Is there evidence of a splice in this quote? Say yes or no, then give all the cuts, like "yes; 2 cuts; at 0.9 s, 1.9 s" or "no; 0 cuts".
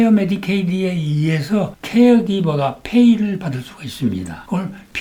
no; 0 cuts